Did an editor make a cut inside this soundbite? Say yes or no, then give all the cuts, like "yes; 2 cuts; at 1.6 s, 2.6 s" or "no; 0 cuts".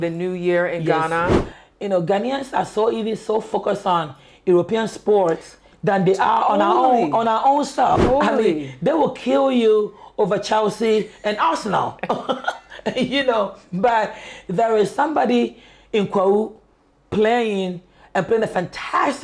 yes; 2 cuts; at 1.4 s, 8.0 s